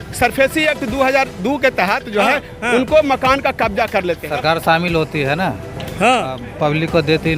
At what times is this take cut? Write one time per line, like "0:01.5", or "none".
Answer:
0:04.2

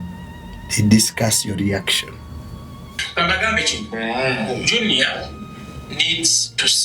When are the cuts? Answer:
0:03.0

